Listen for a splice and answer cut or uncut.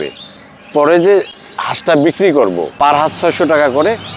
cut